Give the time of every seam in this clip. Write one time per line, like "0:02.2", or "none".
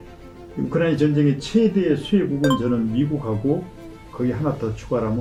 none